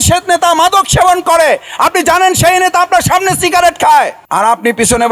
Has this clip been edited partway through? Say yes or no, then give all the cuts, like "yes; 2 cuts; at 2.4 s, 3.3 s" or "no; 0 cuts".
yes; 1 cut; at 4.2 s